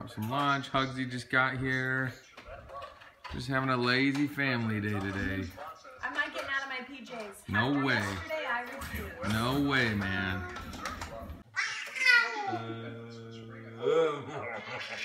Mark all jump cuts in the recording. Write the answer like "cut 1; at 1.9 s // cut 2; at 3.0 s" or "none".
none